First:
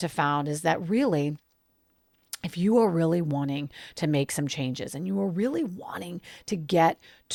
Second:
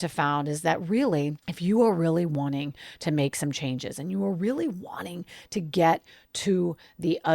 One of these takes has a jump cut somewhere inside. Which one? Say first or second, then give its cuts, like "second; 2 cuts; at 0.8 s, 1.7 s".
second; 1 cut; at 1.5 s